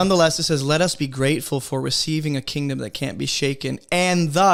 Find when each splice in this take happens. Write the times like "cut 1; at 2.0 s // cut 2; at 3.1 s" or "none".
none